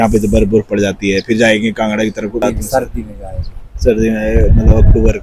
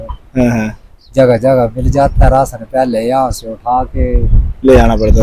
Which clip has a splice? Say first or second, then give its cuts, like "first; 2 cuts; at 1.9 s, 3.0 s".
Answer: first; 1 cut; at 2.4 s